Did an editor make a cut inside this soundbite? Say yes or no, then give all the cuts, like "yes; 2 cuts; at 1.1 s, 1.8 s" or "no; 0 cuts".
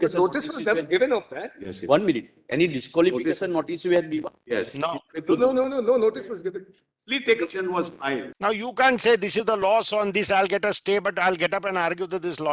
yes; 1 cut; at 8.3 s